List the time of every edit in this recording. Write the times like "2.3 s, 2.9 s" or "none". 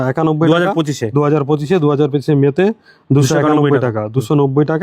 none